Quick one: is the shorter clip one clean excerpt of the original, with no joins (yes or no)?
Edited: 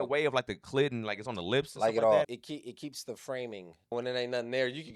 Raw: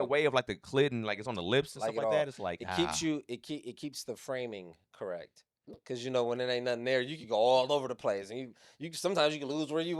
no